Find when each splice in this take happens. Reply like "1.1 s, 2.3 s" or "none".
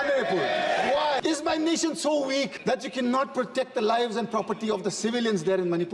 1.2 s, 2.5 s